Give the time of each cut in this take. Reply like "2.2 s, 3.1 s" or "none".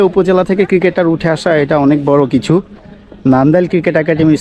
none